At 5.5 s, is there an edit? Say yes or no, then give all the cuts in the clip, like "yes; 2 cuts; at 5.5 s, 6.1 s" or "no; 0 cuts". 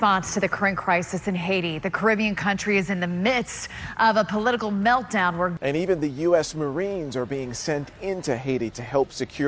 yes; 1 cut; at 5.5 s